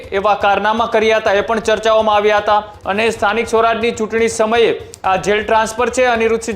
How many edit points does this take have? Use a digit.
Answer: 1